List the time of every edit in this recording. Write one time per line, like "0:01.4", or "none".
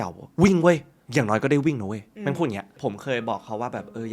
0:01.0
0:02.7